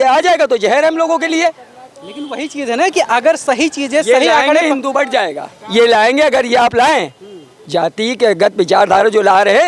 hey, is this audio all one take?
yes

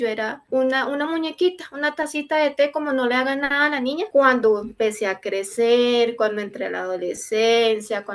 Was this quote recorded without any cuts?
no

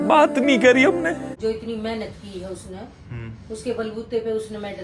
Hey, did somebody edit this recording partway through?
yes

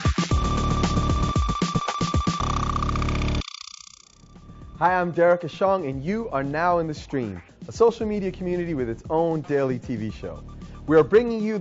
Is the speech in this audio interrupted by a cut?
no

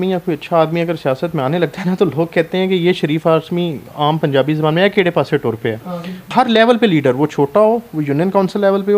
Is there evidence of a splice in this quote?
yes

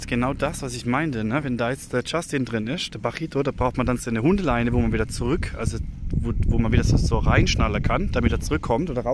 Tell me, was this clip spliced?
no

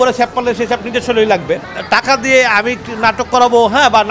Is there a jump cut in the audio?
yes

